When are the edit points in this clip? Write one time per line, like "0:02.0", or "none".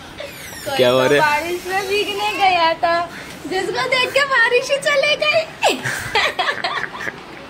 none